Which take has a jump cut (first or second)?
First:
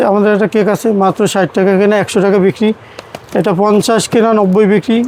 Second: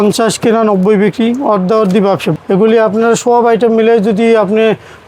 second